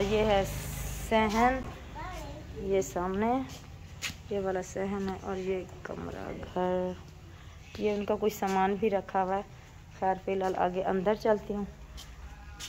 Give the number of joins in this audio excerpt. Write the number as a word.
zero